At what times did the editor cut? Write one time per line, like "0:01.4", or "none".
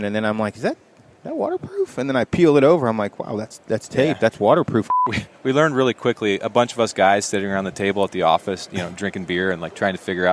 0:04.9